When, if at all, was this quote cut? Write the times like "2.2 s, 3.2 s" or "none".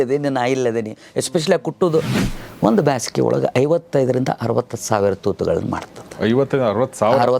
2.2 s